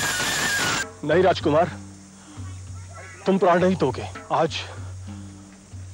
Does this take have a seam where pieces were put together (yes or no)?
yes